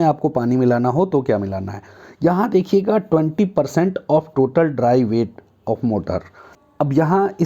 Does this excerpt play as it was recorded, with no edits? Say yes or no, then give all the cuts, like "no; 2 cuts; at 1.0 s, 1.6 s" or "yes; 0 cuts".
no; 1 cut; at 6.6 s